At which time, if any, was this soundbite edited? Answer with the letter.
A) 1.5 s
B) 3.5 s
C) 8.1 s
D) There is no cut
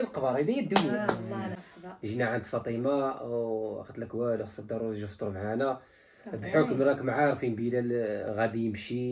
A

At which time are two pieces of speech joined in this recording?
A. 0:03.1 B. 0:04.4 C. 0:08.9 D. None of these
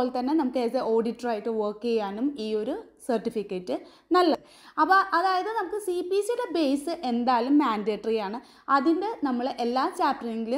B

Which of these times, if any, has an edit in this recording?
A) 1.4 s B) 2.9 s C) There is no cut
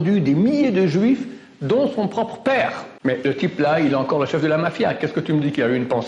B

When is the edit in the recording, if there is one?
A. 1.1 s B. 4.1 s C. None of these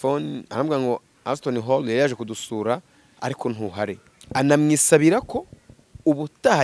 B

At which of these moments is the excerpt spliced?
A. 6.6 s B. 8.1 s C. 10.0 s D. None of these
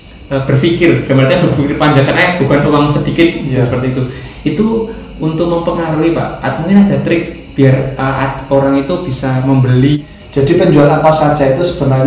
C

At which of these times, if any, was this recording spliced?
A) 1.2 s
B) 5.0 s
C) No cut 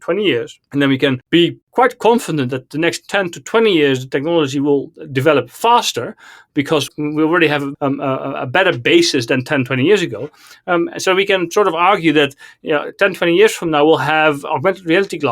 A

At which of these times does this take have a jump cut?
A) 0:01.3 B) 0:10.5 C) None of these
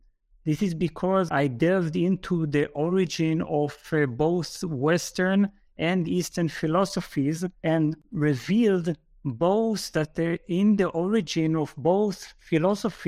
A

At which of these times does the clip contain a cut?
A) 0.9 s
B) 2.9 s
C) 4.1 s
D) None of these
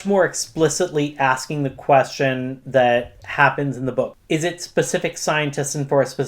C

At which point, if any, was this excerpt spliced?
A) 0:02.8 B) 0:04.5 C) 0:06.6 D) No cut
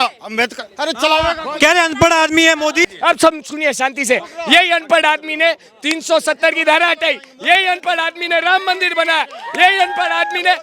A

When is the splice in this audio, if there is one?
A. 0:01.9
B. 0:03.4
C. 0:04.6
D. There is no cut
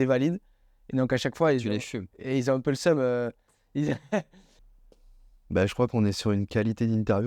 C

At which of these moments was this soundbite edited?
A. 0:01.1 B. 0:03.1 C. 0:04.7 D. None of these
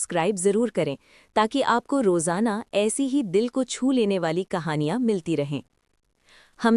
D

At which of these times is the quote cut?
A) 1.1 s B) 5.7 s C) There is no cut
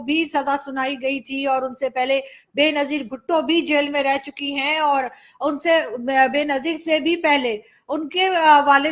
C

